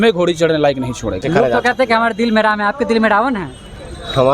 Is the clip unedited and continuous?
no; 1 cut; at 1.2 s

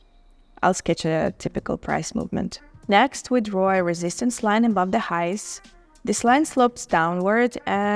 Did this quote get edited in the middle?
yes; 1 cut; at 2.7 s

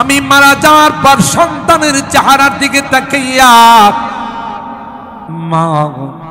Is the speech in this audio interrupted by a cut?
no; 0 cuts

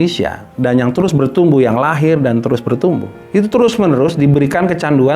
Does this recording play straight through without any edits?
no; 1 cut; at 3.1 s

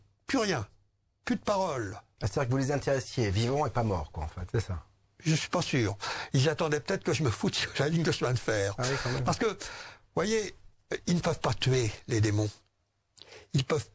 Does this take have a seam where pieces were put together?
no; 0 cuts

